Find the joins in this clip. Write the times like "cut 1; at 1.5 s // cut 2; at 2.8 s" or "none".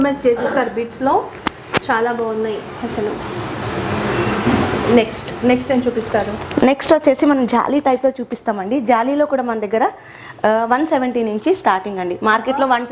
none